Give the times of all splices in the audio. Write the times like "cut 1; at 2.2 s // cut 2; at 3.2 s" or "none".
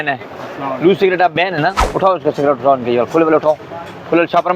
cut 1; at 1.8 s